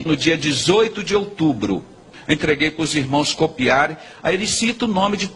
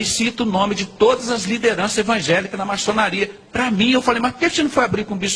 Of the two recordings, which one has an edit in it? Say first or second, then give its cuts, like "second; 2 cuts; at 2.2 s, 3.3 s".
first; 1 cut; at 2.1 s